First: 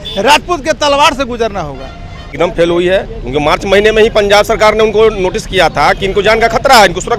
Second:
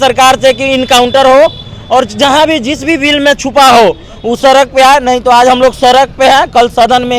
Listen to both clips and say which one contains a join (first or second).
first